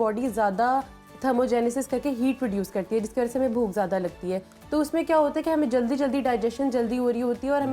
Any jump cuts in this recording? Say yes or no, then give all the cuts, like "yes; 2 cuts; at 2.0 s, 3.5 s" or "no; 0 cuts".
no; 0 cuts